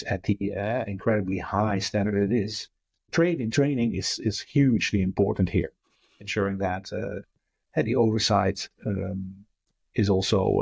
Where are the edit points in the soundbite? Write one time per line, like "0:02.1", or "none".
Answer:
0:03.0